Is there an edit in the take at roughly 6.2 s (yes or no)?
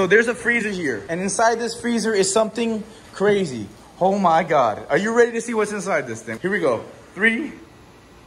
yes